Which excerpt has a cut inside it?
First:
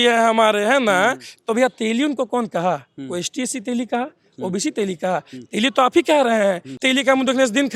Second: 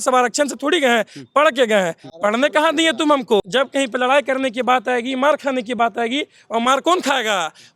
second; 1 cut; at 3.5 s

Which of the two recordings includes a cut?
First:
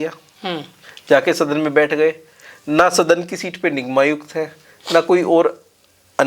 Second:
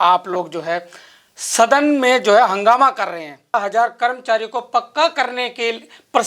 second; 1 cut; at 3.5 s

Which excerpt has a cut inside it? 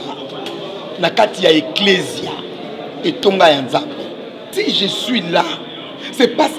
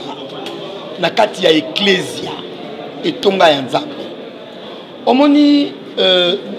first; 1 cut; at 4.5 s

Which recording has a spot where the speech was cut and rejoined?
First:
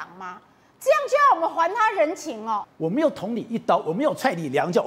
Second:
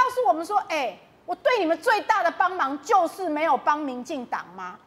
first; 1 cut; at 2.6 s

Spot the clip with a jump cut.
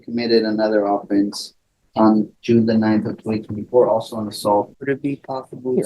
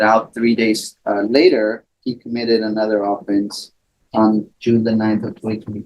first; 1 cut; at 4.7 s

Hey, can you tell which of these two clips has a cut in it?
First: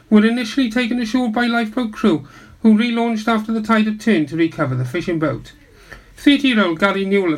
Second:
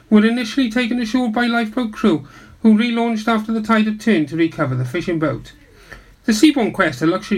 second; 1 cut; at 6.1 s

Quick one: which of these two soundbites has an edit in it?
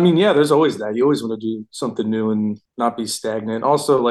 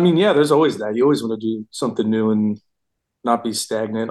first; 1 cut; at 2.6 s

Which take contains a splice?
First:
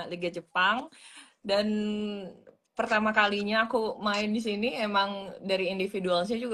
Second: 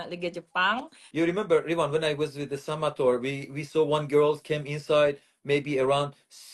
second; 1 cut; at 1.0 s

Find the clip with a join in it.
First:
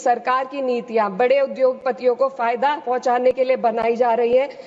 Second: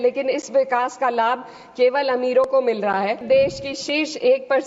second; 1 cut; at 3.2 s

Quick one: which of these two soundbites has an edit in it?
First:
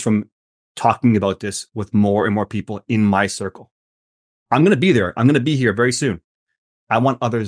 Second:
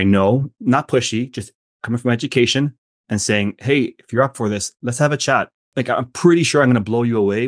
second; 1 cut; at 5.6 s

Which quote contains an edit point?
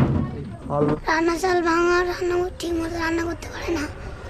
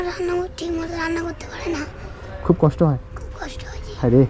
first; 1 cut; at 0.9 s

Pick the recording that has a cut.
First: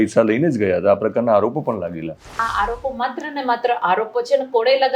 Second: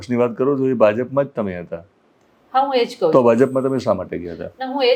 first; 1 cut; at 2.3 s

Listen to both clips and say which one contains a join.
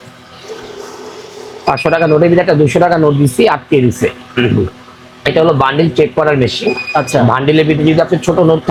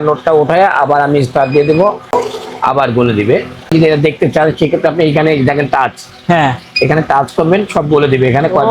second; 2 cuts; at 2.1 s, 3.7 s

